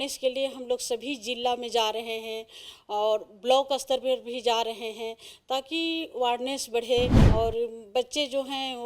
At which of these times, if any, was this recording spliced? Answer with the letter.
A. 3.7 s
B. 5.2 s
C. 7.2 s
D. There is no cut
C